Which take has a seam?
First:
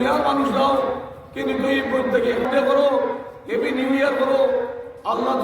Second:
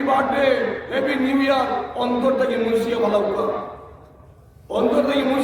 first; 1 cut; at 2.5 s

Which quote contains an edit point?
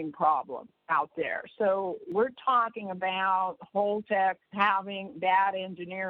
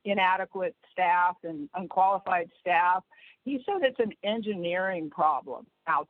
first; 2 cuts; at 2.1 s, 4.4 s

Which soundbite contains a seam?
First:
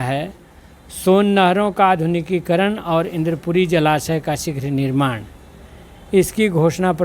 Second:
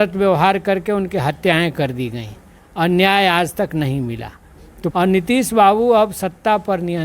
second; 1 cut; at 4.9 s

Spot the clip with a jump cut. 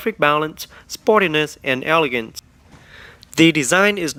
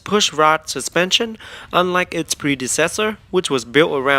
second; 1 cut; at 2.7 s

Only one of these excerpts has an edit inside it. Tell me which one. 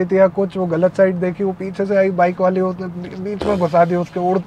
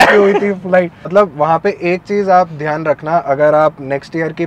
second; 1 cut; at 1.0 s

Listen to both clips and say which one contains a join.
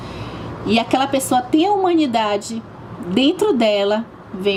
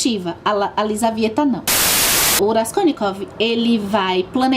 second; 1 cut; at 2.2 s

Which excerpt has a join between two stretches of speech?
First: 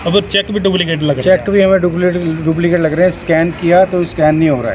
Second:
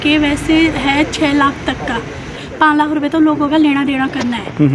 second; 1 cut; at 2.4 s

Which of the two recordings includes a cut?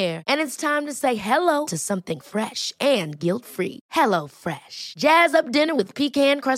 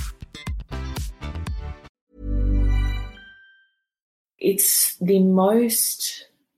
second; 1 cut; at 4.3 s

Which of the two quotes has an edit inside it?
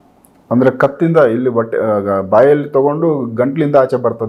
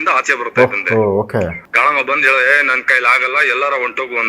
second; 1 cut; at 1.6 s

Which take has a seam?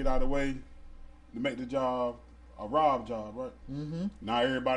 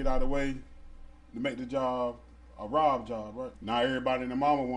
second; 1 cut; at 3.6 s

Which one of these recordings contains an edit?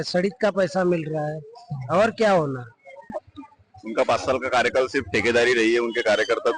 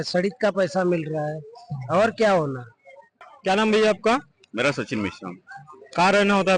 first; 1 cut; at 3.3 s

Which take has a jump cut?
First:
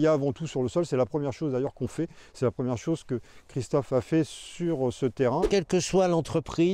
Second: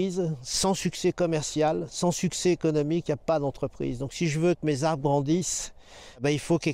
first; 1 cut; at 5.5 s

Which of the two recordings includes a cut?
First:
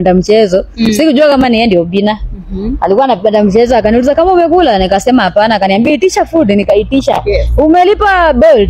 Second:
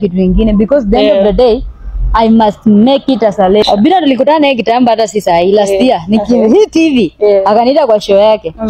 second; 1 cut; at 5.2 s

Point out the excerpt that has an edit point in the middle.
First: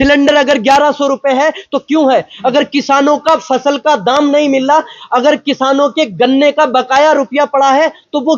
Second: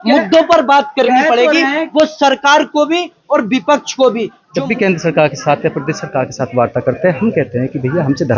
second; 1 cut; at 4.4 s

